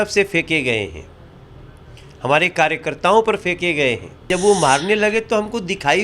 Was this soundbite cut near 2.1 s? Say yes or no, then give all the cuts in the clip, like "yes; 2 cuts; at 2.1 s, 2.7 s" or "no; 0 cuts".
no; 1 cut; at 4.1 s